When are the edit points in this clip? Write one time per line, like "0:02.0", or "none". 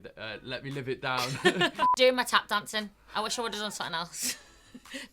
0:01.8